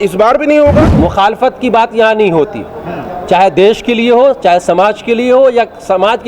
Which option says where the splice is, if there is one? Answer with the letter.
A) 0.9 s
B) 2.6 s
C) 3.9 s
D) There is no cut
A